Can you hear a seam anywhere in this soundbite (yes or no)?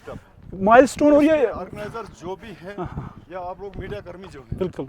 no